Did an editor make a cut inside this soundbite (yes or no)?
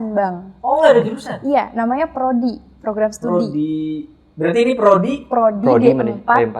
no